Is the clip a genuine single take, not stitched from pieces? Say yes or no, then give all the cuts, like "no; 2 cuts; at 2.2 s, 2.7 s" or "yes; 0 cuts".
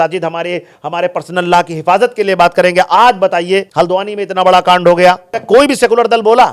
no; 2 cuts; at 3.7 s, 5.4 s